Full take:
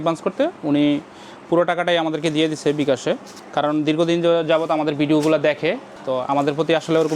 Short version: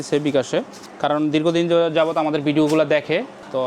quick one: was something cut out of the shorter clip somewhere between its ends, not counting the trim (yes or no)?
no